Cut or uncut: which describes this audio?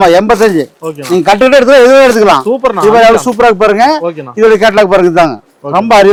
uncut